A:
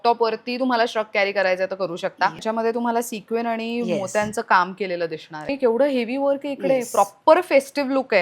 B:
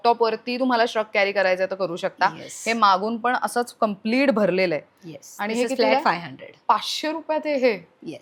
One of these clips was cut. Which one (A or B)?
A